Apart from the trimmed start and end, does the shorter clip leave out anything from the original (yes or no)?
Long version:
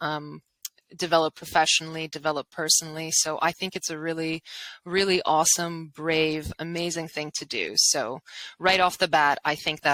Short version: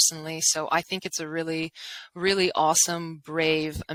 no